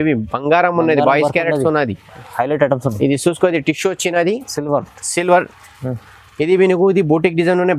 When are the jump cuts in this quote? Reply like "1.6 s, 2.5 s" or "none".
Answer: none